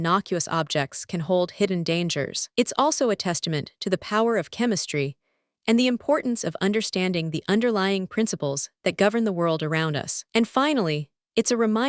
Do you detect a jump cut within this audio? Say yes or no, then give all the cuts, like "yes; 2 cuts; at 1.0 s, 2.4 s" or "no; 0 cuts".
yes; 1 cut; at 10.1 s